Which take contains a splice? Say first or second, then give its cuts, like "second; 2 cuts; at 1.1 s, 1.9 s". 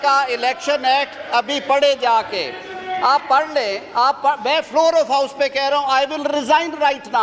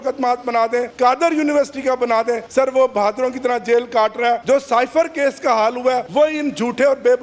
second; 4 cuts; at 0.9 s, 2.4 s, 4.4 s, 6.1 s